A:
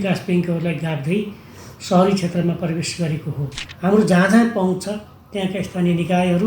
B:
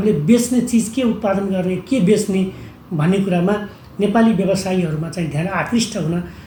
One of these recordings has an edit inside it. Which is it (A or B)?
A